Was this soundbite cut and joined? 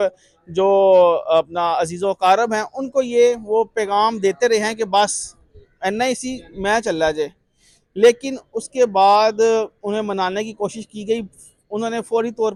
no; 0 cuts

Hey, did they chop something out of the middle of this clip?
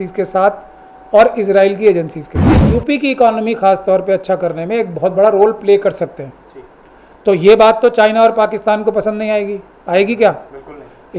yes; 1 cut; at 2.6 s

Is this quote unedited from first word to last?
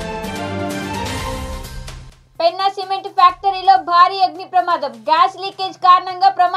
no; 1 cut; at 1.9 s

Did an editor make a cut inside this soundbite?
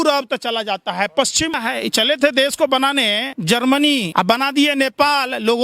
yes; 3 cuts; at 1.6 s, 3.3 s, 4.1 s

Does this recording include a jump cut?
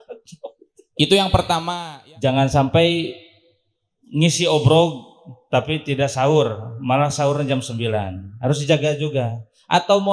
yes; 1 cut; at 1.7 s

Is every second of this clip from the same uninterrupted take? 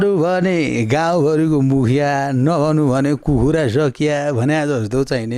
yes; 0 cuts

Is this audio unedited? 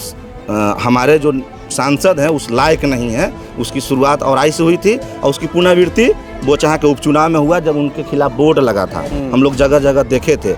yes; 0 cuts

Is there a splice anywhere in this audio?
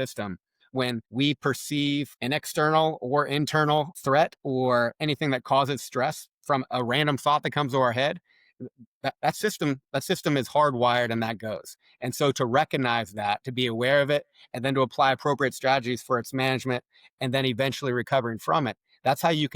yes; 3 cuts; at 1.1 s, 2.1 s, 3.9 s

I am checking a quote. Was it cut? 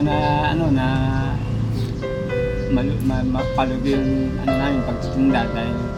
no; 0 cuts

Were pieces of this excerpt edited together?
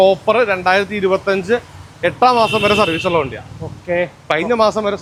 no; 0 cuts

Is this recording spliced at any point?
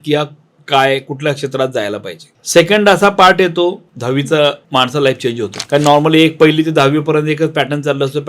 yes; 2 cuts; at 2.4 s, 4.6 s

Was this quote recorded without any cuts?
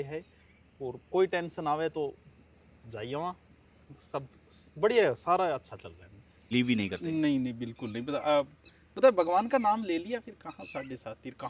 no; 1 cut; at 6.5 s

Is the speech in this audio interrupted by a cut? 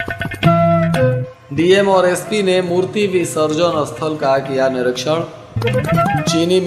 yes; 1 cut; at 1.3 s

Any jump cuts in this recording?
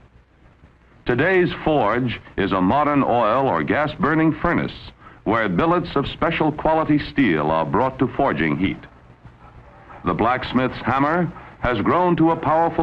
yes; 1 cut; at 4.6 s

